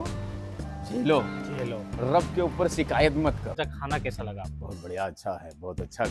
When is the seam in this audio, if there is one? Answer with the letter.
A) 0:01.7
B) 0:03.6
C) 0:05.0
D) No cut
B